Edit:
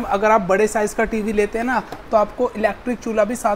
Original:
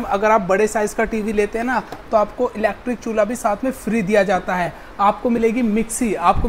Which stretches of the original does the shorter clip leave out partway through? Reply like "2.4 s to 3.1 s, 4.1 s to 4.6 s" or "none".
none